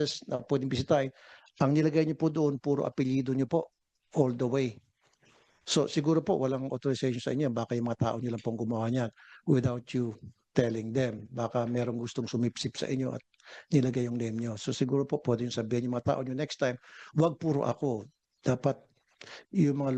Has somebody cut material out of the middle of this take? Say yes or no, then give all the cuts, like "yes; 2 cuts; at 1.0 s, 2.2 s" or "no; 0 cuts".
no; 0 cuts